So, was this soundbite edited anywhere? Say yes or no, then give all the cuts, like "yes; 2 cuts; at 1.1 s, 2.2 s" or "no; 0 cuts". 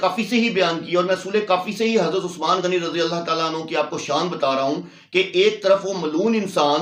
no; 0 cuts